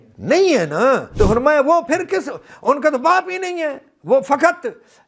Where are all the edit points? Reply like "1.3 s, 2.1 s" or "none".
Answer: 1.1 s